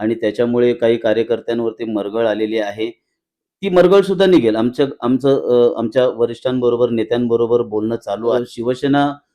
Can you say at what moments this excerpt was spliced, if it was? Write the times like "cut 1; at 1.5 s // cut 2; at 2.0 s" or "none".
cut 1; at 8.4 s

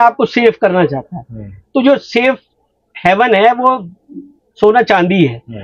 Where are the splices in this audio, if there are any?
none

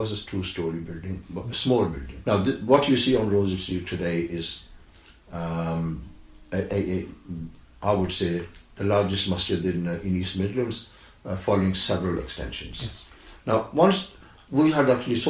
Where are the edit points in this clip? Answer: cut 1; at 2.1 s

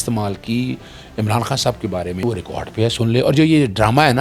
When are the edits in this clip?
cut 1; at 2.2 s

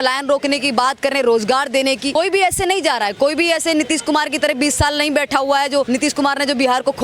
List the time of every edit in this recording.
cut 1; at 2.1 s // cut 2; at 5.9 s

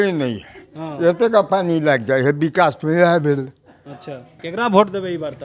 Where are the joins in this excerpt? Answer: cut 1; at 4.4 s

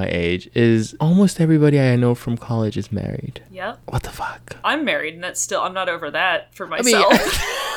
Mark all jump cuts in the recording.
none

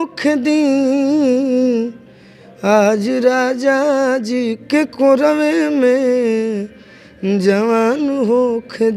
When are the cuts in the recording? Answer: none

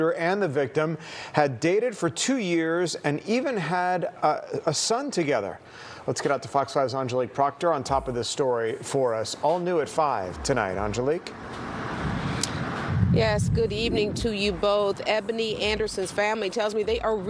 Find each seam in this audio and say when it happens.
cut 1; at 3.4 s // cut 2; at 6.3 s

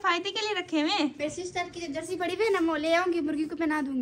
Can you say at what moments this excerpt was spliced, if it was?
cut 1; at 1.1 s

